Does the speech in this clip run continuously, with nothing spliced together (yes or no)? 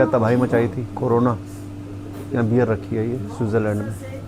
yes